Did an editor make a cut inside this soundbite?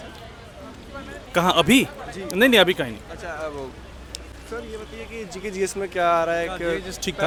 no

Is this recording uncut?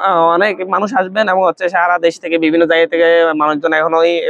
yes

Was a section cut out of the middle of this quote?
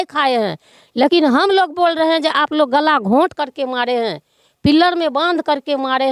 no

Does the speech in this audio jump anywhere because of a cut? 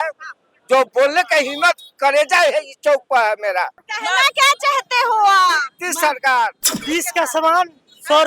yes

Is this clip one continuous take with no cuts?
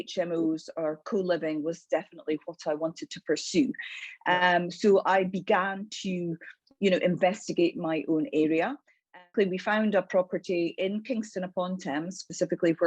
no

